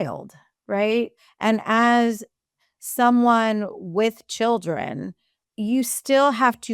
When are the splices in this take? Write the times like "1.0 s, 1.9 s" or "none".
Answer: 1.2 s